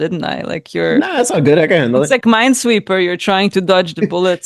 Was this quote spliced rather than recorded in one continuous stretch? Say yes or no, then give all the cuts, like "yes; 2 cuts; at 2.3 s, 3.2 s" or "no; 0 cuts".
no; 0 cuts